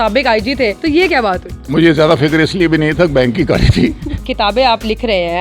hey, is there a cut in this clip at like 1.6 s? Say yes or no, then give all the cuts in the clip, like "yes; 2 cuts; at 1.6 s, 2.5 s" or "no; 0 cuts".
yes; 2 cuts; at 1.6 s, 4.1 s